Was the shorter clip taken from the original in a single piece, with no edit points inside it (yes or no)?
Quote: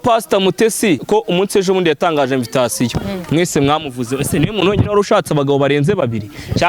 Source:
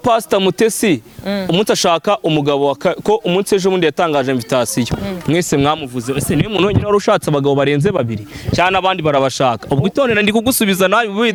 no